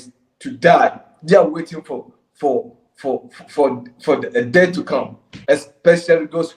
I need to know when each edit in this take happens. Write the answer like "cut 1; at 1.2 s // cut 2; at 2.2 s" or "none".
cut 1; at 5.3 s